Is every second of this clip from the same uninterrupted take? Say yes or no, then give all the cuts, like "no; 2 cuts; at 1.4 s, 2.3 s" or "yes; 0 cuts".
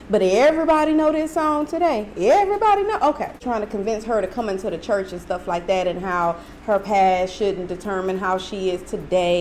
no; 1 cut; at 3.4 s